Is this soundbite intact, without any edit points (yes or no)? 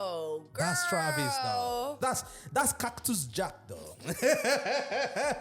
no